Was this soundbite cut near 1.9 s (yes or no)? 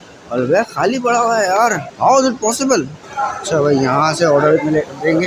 yes